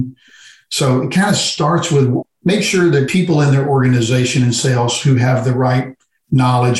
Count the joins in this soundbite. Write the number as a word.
zero